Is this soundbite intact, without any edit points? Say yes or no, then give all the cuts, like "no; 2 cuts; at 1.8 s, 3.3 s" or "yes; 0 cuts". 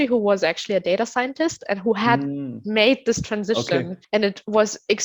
no; 1 cut; at 4.0 s